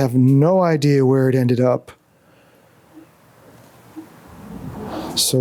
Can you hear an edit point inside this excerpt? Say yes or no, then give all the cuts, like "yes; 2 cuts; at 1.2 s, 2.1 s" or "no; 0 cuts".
no; 0 cuts